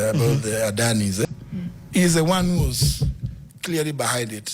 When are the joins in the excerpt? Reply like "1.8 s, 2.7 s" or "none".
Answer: 1.3 s